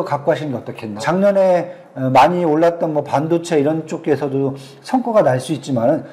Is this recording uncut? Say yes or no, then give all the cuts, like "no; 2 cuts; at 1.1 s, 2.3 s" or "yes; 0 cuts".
no; 1 cut; at 1.0 s